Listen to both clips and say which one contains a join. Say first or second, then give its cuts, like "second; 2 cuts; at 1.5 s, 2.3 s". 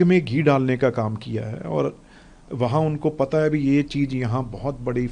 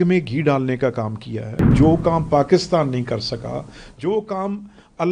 second; 1 cut; at 1.7 s